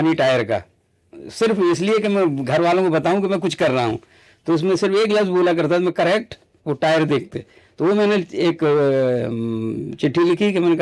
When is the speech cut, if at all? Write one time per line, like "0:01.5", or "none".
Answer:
none